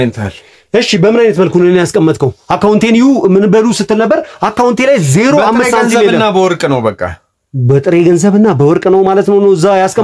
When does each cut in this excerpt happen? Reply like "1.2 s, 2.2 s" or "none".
none